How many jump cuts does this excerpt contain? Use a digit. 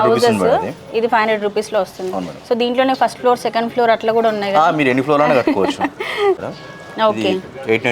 1